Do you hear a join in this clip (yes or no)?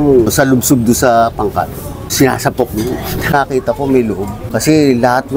yes